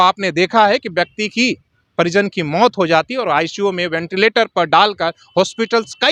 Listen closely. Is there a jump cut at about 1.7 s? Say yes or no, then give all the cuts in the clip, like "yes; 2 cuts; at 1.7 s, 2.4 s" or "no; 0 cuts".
no; 0 cuts